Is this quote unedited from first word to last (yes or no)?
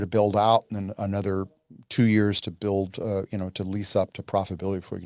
yes